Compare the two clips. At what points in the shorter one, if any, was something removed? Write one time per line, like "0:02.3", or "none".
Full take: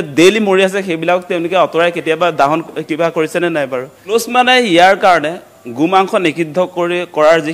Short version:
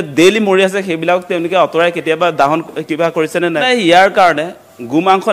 0:03.6